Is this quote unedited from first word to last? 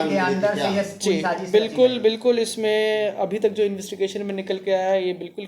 yes; 0 cuts

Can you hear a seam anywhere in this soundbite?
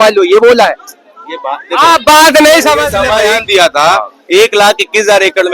yes; 1 cut; at 3.3 s

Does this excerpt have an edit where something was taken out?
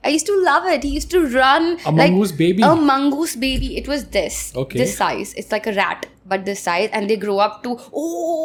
no; 0 cuts

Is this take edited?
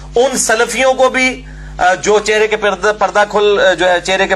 no; 0 cuts

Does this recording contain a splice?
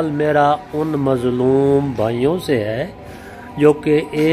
no; 0 cuts

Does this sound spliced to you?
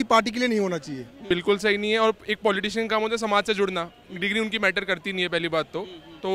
yes; 1 cut; at 1.2 s

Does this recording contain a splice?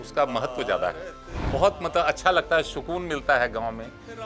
yes; 1 cut; at 1.4 s

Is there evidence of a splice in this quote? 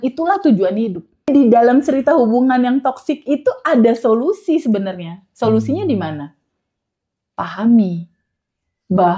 yes; 1 cut; at 1.3 s

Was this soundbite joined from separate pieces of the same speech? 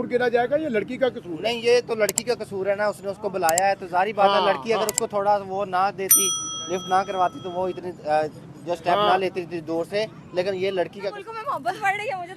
yes; 1 cut; at 11.2 s

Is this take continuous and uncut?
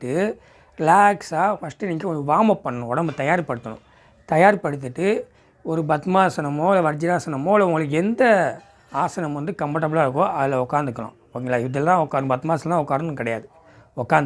yes; 0 cuts

